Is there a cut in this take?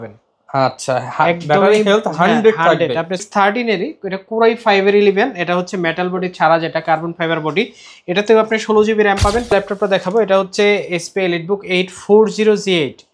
yes; 2 cuts; at 3.2 s, 9.5 s

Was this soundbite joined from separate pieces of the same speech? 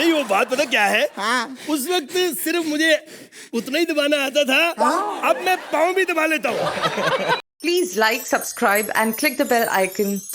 yes; 1 cut; at 7.4 s

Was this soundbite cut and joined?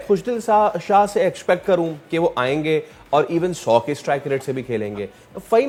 no; 0 cuts

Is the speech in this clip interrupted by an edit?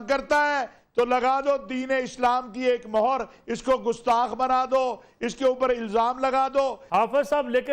yes; 1 cut; at 6.8 s

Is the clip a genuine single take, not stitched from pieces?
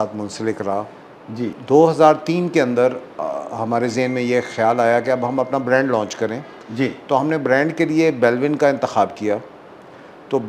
no; 1 cut; at 1.5 s

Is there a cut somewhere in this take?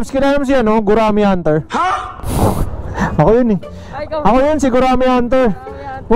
yes; 1 cut; at 1.7 s

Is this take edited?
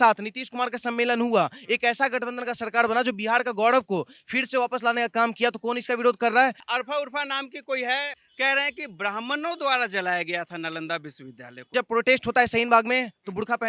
yes; 3 cuts; at 6.6 s, 8.2 s, 11.7 s

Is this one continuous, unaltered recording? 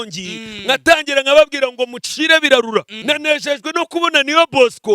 no; 1 cut; at 2.9 s

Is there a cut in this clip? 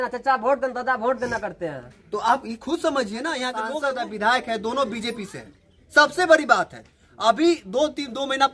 yes; 1 cut; at 3.7 s

